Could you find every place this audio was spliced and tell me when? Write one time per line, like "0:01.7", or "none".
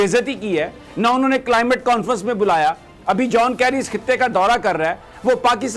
none